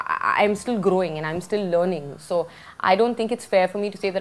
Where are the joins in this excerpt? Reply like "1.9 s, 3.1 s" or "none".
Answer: none